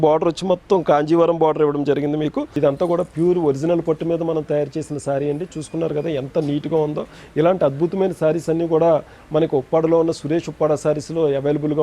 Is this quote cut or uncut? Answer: cut